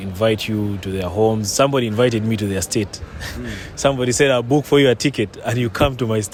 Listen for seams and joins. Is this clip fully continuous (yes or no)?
yes